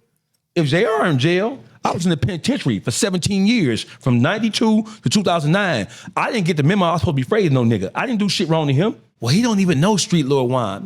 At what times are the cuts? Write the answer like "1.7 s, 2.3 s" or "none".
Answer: 1.7 s, 9.1 s